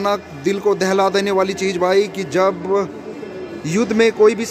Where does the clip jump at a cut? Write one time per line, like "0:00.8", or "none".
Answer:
none